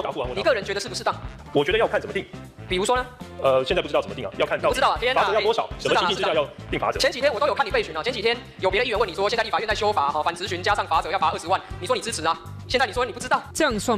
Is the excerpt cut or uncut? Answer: cut